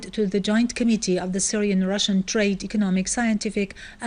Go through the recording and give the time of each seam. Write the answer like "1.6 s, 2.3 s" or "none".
1.8 s